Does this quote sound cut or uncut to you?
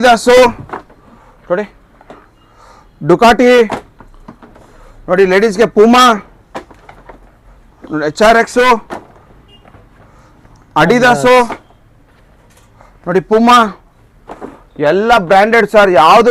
uncut